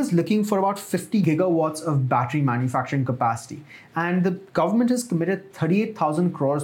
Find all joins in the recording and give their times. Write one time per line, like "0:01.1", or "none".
0:01.2